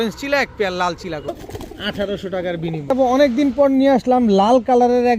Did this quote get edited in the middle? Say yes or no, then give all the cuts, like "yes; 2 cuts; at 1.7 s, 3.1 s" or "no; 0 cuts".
yes; 2 cuts; at 1.3 s, 2.9 s